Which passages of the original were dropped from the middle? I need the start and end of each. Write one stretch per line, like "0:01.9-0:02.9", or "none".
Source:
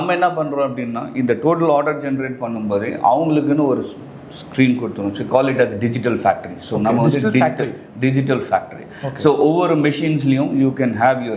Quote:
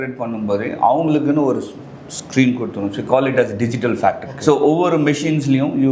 0:06.5-0:09.1